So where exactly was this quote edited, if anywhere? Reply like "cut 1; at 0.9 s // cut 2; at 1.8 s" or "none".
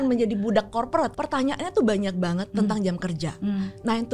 cut 1; at 1.1 s

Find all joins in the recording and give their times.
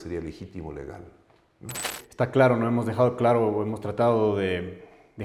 cut 1; at 2.0 s

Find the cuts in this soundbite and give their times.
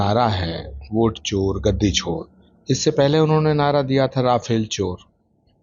none

